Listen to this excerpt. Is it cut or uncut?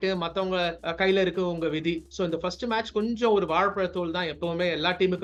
uncut